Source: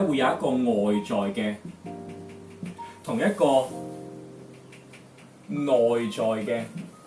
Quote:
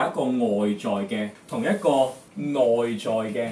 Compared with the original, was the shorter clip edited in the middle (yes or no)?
yes